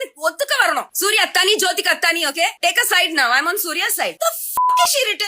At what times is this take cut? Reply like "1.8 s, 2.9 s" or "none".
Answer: 0.9 s